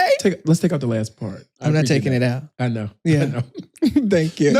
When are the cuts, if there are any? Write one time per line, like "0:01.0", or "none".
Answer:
0:01.5

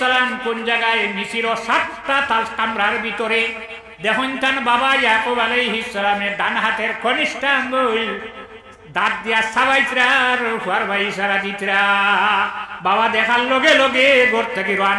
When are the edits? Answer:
none

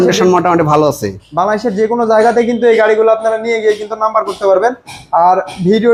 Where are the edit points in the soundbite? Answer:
none

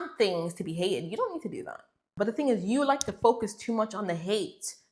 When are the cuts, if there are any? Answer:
0:02.1

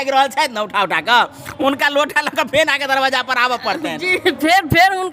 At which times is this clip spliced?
none

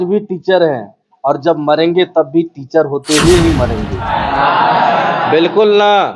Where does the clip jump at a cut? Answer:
0:04.1

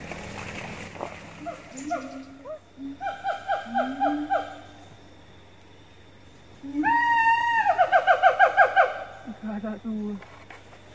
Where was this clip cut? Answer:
0:01.3

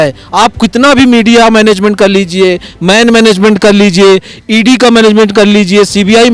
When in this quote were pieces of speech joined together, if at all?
none

